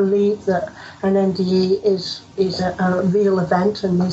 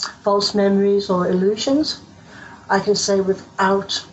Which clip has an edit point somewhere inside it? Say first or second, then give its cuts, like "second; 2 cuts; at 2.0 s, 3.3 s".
first; 1 cut; at 2.2 s